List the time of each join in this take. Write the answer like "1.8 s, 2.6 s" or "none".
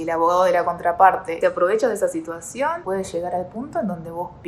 1.4 s, 2.8 s